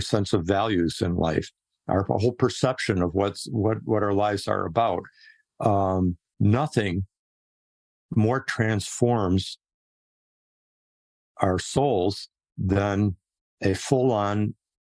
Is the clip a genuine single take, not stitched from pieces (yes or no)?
yes